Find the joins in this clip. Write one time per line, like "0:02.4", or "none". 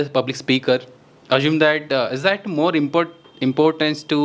none